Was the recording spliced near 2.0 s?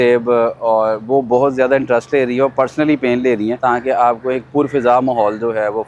no; 1 cut; at 3.6 s

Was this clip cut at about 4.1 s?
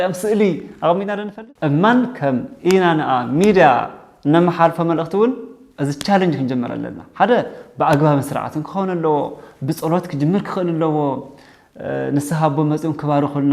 no; 1 cut; at 1.3 s

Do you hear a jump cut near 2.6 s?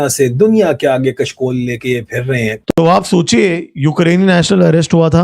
yes; 1 cut; at 2.6 s

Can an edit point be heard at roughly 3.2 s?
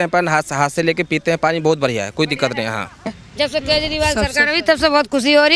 yes; 1 cut; at 3.2 s

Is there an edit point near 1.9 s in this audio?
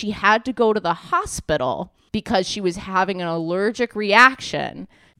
yes; 1 cut; at 1.9 s

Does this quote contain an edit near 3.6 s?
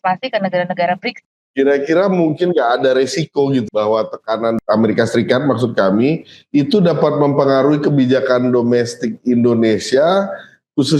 yes; 3 cuts; at 1.1 s, 3.6 s, 4.6 s

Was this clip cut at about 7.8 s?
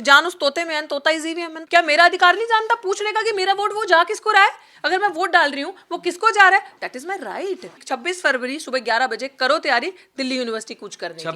yes; 2 cuts; at 1.6 s, 7.8 s

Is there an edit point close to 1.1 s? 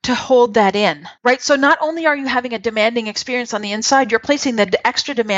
yes; 1 cut; at 1.1 s

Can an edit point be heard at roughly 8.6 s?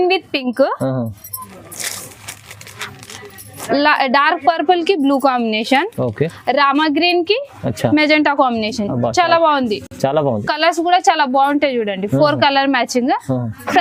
no; 0 cuts

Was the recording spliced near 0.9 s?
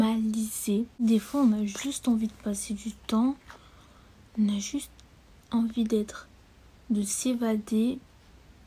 yes; 1 cut; at 0.9 s

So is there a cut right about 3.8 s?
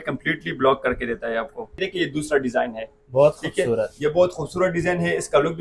no; 1 cut; at 1.8 s

